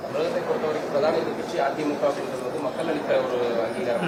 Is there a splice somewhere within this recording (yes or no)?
no